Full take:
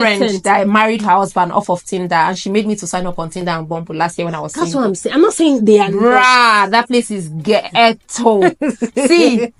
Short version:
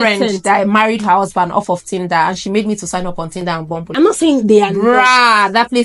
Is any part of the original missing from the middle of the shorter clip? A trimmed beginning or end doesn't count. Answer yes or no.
yes